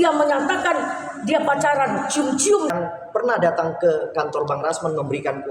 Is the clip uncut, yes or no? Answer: no